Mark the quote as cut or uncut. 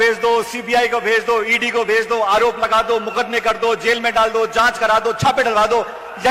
uncut